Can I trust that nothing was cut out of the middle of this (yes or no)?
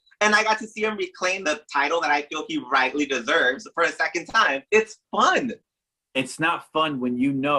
no